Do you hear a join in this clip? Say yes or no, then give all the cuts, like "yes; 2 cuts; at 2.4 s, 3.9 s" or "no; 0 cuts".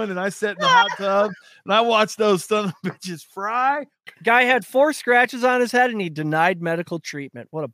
yes; 1 cut; at 3.9 s